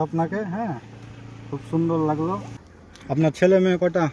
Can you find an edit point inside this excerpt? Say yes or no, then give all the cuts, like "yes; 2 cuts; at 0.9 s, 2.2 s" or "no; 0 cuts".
yes; 1 cut; at 2.5 s